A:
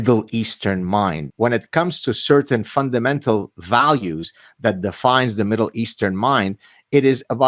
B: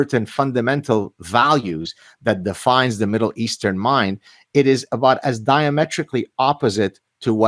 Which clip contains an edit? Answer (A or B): A